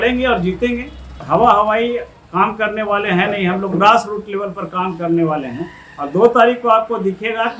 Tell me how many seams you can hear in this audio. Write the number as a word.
one